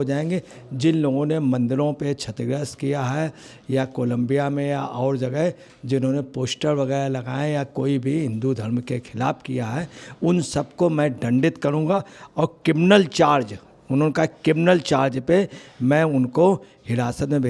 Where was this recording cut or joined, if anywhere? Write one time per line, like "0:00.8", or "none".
none